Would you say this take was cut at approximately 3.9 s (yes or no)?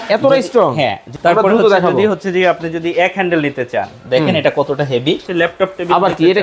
no